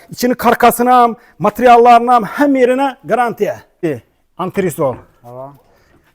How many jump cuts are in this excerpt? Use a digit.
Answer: 1